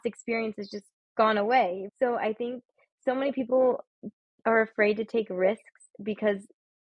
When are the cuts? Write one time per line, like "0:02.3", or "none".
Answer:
0:01.9